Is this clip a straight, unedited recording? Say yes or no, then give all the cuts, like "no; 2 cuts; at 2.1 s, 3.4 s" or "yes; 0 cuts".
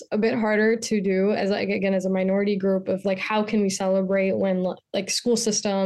yes; 0 cuts